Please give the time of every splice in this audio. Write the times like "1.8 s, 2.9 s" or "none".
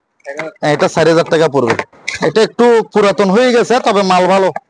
1.9 s

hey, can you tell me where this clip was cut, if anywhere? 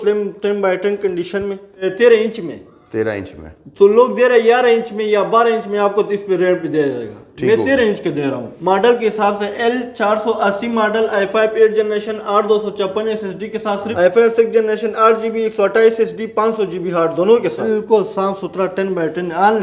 1.8 s, 8.5 s, 13.9 s, 17.6 s

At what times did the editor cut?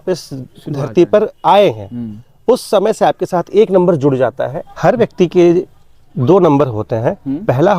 4.6 s

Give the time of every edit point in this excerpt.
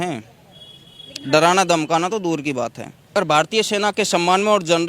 2.9 s

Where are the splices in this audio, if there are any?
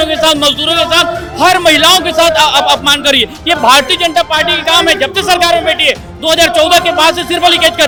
none

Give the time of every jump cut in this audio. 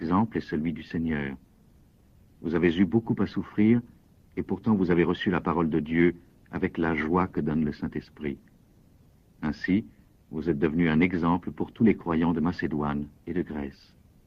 11.2 s

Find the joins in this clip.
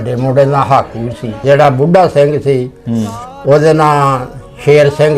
1.4 s

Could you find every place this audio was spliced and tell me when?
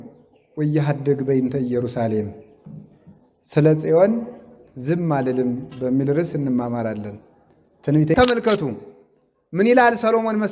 8.2 s

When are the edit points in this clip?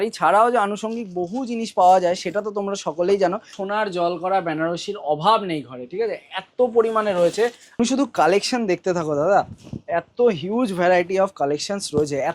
3.6 s, 7.8 s

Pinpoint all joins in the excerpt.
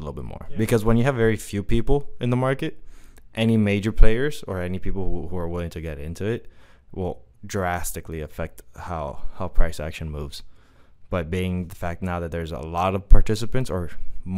none

